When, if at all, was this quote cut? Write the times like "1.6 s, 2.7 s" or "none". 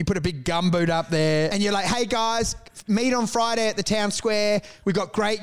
1.5 s